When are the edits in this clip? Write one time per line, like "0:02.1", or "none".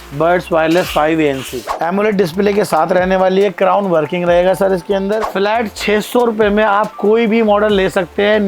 0:01.7
0:05.2